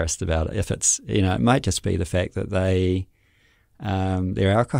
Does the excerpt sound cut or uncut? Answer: uncut